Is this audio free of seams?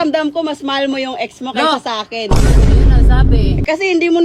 yes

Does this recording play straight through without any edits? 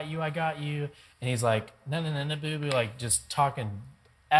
yes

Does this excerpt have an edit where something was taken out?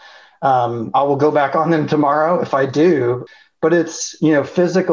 yes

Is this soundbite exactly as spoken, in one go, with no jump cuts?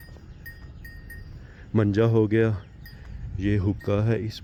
yes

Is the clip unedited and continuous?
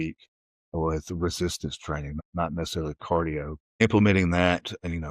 no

